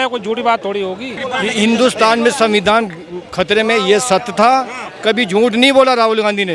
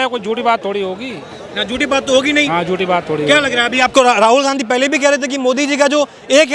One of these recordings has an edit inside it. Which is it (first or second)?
first